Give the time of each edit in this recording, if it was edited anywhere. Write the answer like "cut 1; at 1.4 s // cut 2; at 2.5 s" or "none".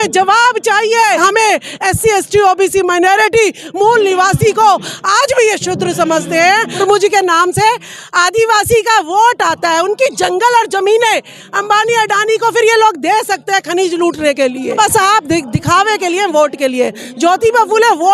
cut 1; at 1.2 s // cut 2; at 6.8 s // cut 3; at 14.8 s